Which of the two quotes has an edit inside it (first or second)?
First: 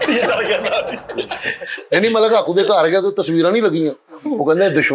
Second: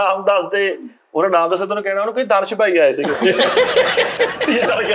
first